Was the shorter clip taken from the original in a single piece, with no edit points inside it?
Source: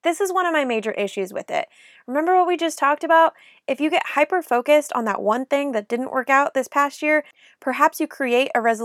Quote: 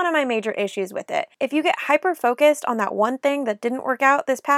no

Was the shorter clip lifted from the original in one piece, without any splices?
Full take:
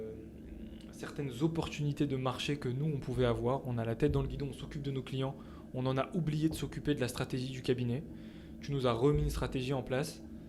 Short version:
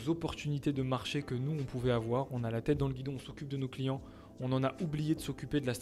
yes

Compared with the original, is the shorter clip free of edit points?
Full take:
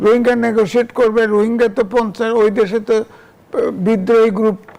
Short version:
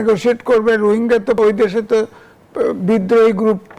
no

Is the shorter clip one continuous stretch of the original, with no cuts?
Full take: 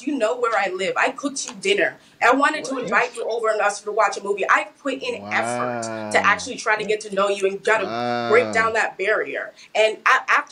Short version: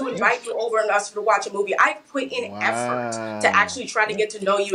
yes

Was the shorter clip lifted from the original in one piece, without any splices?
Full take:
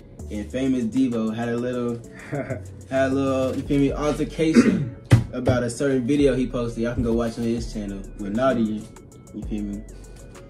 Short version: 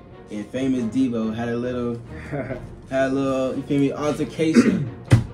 yes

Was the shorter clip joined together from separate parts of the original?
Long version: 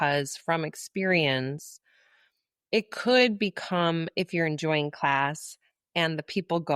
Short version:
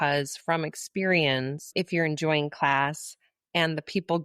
yes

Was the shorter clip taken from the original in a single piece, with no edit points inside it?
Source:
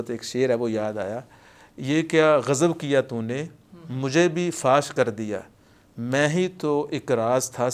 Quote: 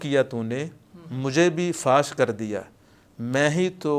yes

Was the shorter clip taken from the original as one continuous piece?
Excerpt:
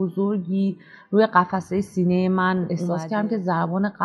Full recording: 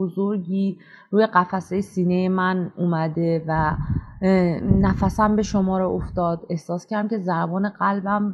no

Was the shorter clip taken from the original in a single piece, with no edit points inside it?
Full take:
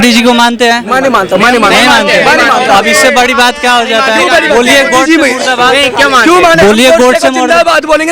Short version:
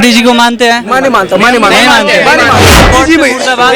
no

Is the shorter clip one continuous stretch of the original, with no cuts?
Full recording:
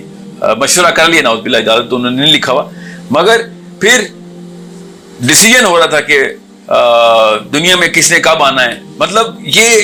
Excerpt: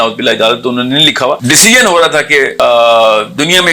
no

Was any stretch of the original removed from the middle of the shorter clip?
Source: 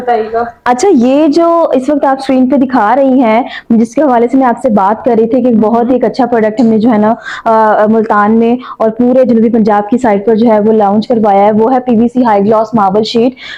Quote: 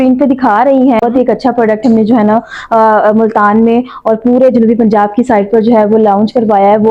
yes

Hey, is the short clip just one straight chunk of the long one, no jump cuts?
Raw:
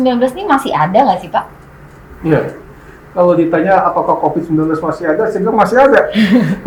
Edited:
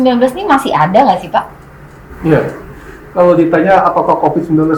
yes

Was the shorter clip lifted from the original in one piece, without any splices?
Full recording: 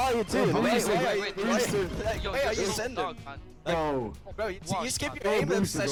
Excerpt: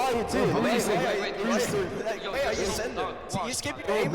no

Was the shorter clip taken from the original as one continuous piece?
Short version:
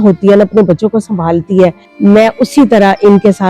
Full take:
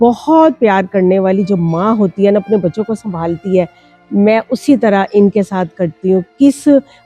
no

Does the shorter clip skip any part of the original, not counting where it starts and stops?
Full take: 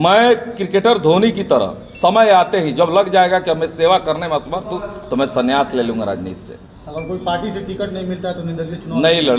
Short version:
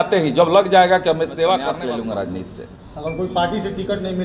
yes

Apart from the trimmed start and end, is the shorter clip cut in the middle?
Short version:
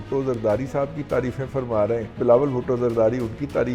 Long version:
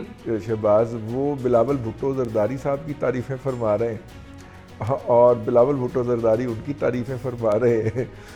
yes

